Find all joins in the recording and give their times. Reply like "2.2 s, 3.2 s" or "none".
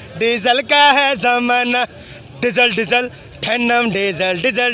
none